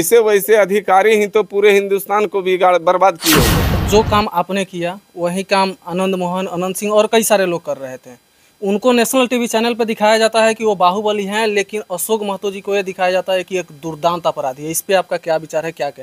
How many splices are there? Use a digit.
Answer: 1